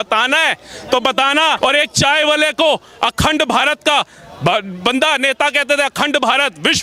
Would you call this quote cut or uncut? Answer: uncut